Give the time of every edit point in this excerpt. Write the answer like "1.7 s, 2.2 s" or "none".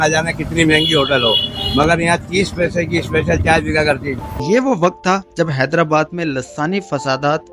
4.3 s

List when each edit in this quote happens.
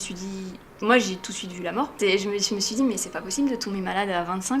1.9 s

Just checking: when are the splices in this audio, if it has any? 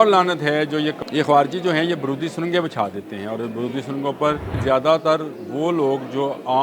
1.0 s, 4.6 s

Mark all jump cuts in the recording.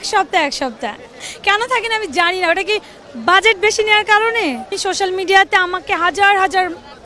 1.1 s, 4.7 s

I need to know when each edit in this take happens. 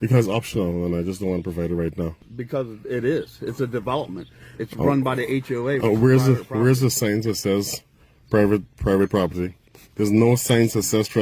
2.2 s

